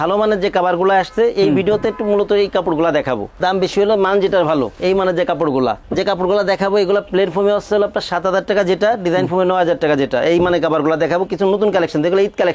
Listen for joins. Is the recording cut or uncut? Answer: uncut